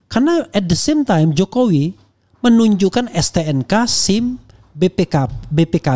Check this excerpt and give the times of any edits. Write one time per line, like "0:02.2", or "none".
none